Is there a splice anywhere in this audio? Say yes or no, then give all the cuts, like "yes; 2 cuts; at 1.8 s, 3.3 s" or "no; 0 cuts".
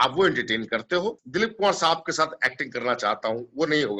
yes; 1 cut; at 1.2 s